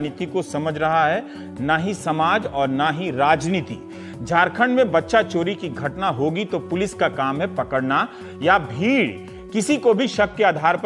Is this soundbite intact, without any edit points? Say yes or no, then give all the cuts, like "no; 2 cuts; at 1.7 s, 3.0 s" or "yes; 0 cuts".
yes; 0 cuts